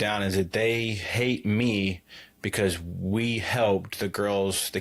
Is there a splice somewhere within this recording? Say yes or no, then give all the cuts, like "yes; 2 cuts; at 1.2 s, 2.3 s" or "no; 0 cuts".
no; 0 cuts